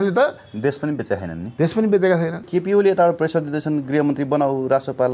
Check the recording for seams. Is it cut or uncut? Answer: cut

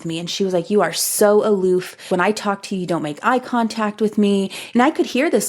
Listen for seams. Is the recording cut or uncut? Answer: cut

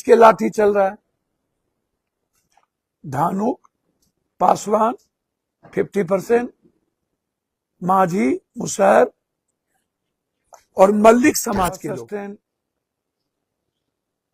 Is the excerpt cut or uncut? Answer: cut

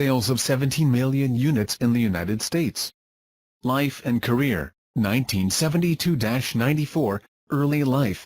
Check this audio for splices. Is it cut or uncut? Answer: cut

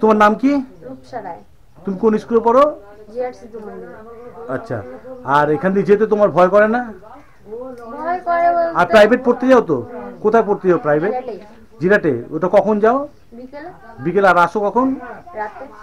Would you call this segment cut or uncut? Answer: uncut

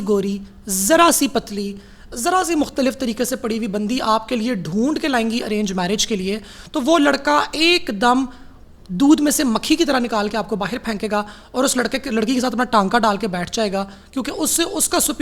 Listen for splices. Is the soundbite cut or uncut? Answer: uncut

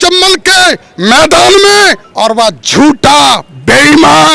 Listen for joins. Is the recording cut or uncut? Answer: cut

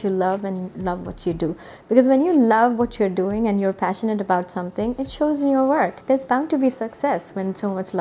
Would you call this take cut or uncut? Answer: cut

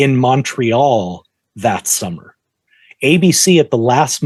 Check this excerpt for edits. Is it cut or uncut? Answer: uncut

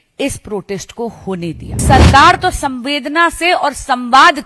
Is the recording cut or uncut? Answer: cut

